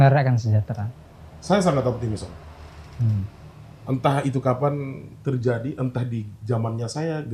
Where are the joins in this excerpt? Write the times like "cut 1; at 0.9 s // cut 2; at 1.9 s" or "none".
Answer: none